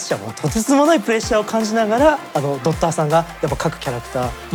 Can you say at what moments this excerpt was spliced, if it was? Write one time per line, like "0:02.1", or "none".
none